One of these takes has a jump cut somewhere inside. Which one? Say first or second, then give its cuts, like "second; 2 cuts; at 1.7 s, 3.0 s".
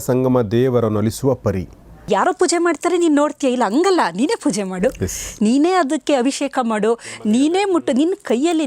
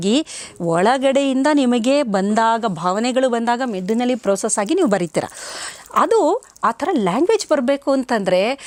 first; 1 cut; at 2.0 s